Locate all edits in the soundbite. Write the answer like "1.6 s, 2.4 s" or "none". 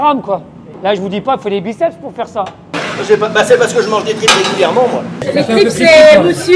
2.8 s, 5.2 s